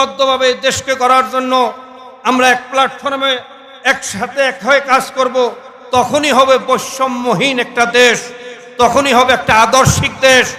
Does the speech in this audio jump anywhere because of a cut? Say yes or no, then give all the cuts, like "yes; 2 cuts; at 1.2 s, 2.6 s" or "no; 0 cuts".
no; 0 cuts